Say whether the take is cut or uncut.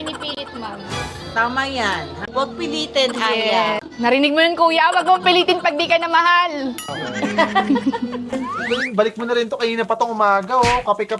cut